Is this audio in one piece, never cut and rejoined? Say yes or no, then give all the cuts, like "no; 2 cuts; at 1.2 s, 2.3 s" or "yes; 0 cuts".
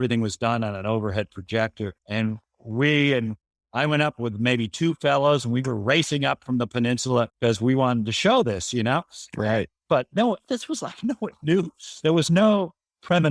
no; 2 cuts; at 2.0 s, 7.3 s